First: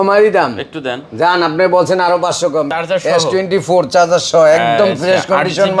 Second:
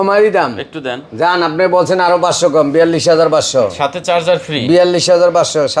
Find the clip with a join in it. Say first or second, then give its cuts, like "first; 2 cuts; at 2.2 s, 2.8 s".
first; 1 cut; at 2.7 s